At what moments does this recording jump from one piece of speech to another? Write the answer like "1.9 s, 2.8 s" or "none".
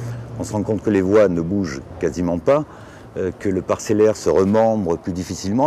none